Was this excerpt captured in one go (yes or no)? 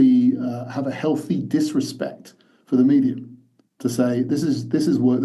yes